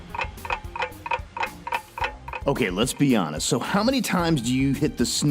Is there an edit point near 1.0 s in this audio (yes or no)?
no